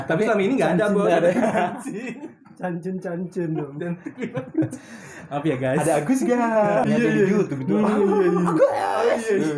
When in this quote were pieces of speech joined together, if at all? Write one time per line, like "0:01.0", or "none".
0:06.9

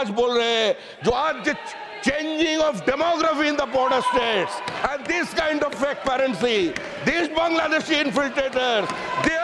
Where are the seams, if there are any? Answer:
none

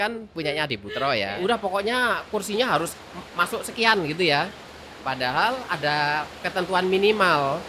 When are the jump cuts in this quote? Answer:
0:01.3

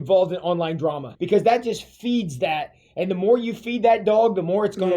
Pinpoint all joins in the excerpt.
0:01.1

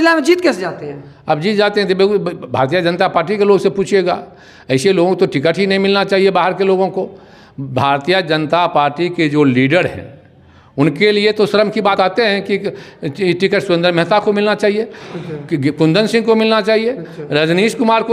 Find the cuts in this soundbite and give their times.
0:11.9

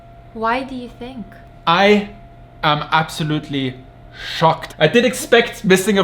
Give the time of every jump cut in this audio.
0:04.7

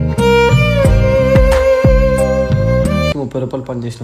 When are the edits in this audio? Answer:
0:03.1

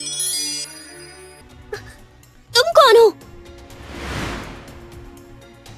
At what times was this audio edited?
0:01.4

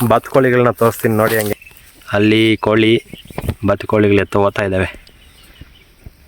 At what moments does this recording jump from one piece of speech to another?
0:01.5

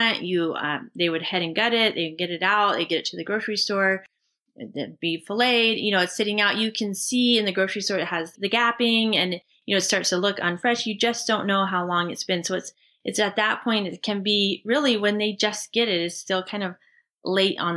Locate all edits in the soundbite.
0:08.3

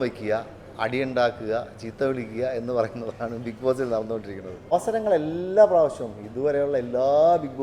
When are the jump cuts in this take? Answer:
0:04.7

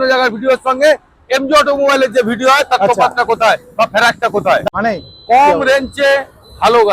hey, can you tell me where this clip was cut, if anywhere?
0:04.6

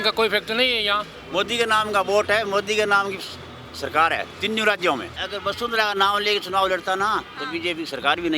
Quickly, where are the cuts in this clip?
0:01.1
0:05.2

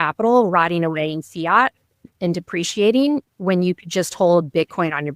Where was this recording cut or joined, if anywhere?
0:02.1

